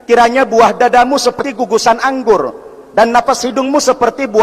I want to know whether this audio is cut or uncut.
cut